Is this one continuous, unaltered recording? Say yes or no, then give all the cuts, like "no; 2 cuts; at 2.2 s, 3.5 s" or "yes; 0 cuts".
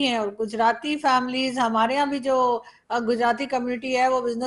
yes; 0 cuts